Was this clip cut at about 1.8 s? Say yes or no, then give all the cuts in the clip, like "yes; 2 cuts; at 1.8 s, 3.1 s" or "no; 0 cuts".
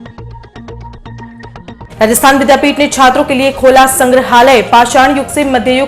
yes; 1 cut; at 1.8 s